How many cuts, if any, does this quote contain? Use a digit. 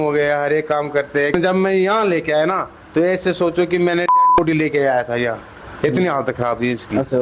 0